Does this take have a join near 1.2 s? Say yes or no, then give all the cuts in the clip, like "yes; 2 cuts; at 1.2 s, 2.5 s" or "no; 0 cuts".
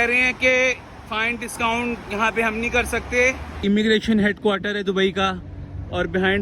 no; 1 cut; at 3.6 s